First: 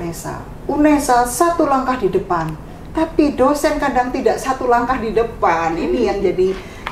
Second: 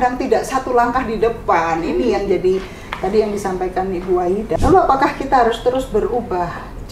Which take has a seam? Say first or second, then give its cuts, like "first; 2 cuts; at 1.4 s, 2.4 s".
second; 1 cut; at 4.5 s